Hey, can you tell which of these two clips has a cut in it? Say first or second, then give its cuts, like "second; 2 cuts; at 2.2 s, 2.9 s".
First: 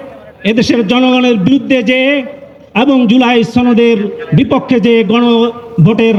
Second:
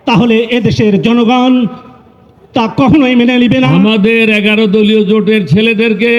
second; 1 cut; at 3.7 s